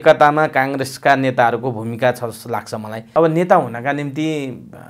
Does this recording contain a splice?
yes; 1 cut; at 3.0 s

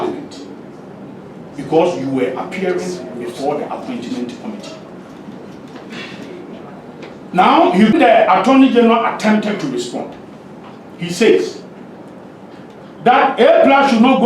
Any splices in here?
yes; 1 cut; at 7.9 s

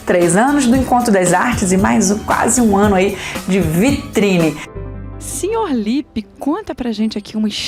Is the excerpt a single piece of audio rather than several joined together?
no; 1 cut; at 4.7 s

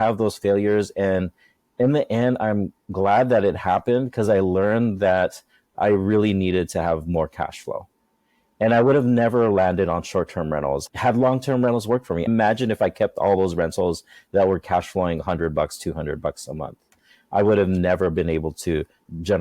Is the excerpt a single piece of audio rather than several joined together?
no; 1 cut; at 2.8 s

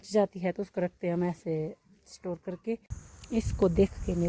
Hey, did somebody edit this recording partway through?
yes; 1 cut; at 3.0 s

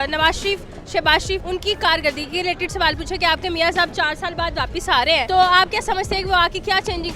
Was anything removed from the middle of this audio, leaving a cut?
yes; 2 cuts; at 1.4 s, 5.2 s

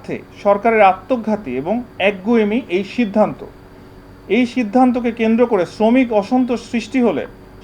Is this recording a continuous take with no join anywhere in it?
yes; 0 cuts

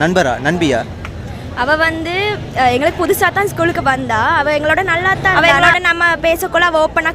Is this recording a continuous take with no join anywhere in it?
no; 1 cut; at 5.3 s

